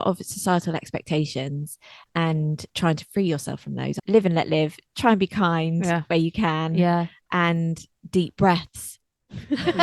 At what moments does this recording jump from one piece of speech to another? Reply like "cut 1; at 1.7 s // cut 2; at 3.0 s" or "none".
cut 1; at 4.0 s